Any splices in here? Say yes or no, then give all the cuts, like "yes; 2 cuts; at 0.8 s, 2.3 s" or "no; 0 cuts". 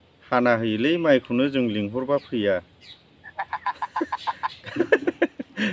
no; 0 cuts